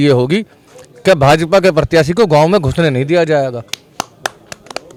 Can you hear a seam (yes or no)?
no